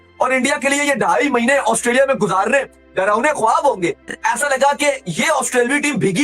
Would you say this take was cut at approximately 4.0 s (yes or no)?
yes